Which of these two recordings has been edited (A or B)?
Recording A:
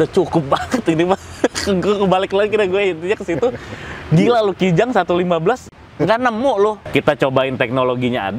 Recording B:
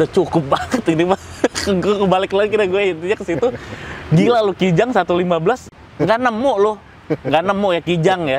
A